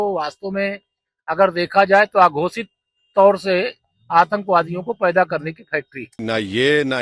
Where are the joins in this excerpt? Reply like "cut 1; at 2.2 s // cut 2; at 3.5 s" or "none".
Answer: cut 1; at 6.1 s